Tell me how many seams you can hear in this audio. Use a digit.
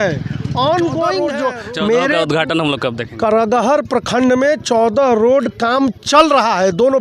1